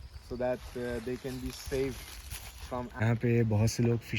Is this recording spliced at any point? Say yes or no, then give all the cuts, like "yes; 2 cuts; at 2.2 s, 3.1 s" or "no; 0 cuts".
yes; 1 cut; at 2.9 s